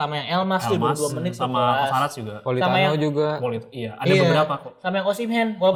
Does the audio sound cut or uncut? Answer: uncut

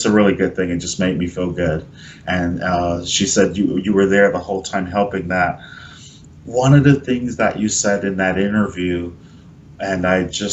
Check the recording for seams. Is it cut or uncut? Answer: cut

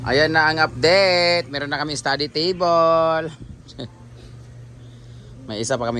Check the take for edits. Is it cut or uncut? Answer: uncut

